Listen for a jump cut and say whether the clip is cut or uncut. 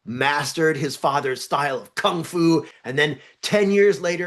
cut